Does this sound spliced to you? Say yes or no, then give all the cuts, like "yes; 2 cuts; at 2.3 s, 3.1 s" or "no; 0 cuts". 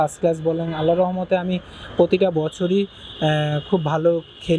no; 0 cuts